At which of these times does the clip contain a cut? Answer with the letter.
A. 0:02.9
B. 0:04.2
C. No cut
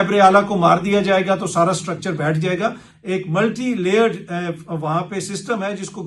A